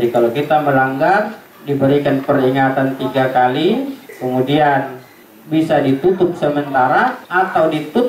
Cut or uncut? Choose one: uncut